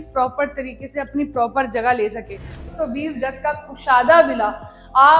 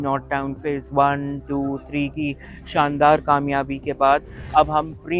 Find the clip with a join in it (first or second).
first